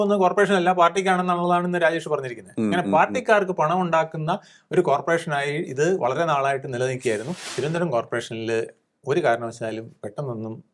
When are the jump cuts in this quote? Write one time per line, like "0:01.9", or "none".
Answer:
0:07.4